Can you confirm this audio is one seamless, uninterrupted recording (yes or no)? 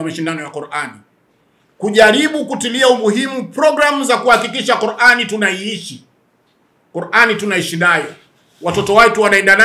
yes